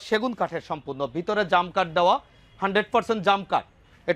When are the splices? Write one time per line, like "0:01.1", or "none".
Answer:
none